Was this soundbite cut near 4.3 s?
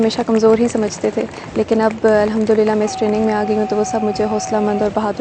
no; 0 cuts

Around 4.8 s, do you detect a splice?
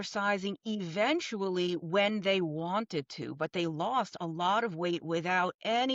no; 0 cuts

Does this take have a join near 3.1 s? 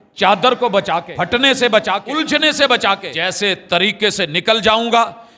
yes; 3 cuts; at 1.1 s, 2.0 s, 3.1 s

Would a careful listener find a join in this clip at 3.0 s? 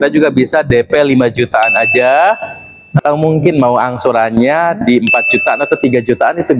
yes; 1 cut; at 3.0 s

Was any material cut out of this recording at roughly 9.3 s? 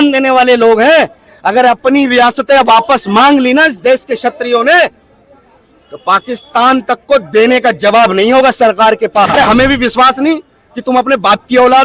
yes; 1 cut; at 9.3 s

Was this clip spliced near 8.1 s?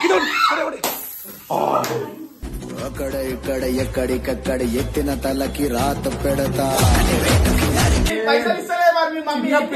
yes; 1 cut; at 8.1 s

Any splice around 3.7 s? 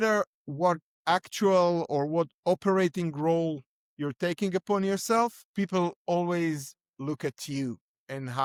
no; 0 cuts

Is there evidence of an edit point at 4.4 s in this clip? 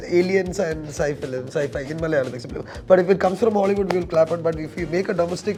no; 0 cuts

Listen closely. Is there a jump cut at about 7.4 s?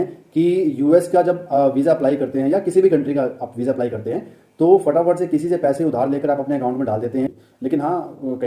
yes; 1 cut; at 7.4 s

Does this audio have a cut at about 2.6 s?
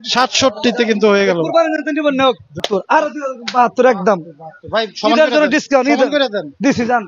yes; 1 cut; at 2.6 s

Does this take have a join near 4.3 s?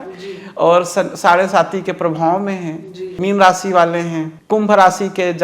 yes; 2 cuts; at 3.2 s, 4.3 s

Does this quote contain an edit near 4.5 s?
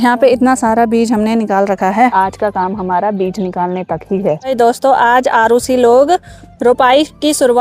yes; 2 cuts; at 2.1 s, 4.5 s

